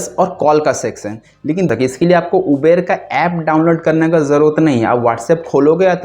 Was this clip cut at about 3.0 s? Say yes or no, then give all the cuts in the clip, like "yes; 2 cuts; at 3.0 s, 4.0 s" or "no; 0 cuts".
no; 1 cut; at 1.7 s